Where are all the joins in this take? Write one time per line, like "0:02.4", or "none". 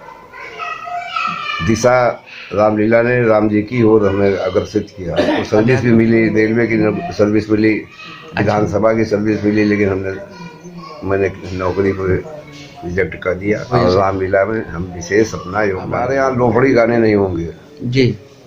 0:05.4
0:13.7
0:16.0